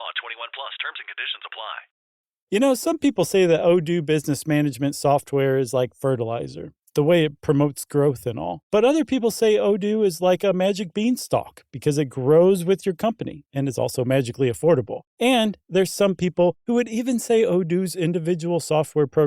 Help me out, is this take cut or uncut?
cut